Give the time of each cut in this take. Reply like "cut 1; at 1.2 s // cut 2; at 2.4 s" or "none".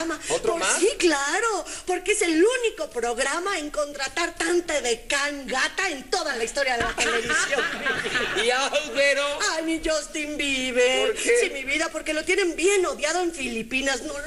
cut 1; at 2.1 s